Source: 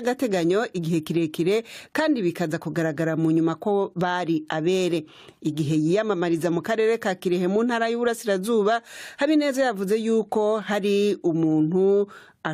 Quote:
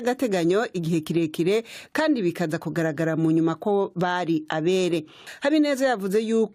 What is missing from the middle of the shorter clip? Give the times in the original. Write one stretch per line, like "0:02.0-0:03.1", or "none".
0:05.2-0:09.0